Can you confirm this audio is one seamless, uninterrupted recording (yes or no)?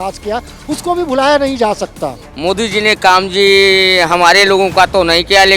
no